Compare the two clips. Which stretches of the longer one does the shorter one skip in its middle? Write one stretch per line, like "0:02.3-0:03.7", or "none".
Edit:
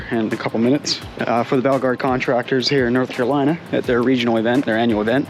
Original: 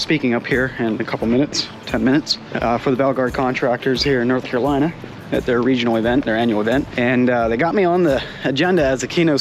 0:01.7-0:02.4
0:05.0-0:05.2